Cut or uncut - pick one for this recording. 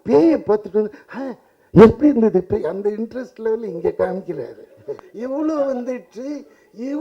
cut